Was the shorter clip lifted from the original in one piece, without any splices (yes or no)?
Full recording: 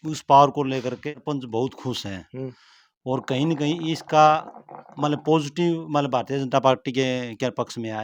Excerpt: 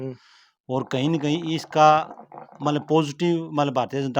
yes